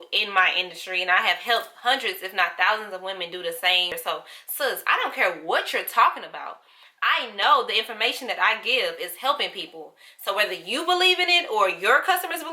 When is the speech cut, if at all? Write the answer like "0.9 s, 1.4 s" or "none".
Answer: 4.0 s